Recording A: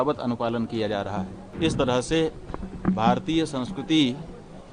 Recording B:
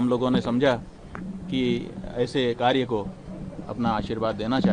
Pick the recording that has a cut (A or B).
A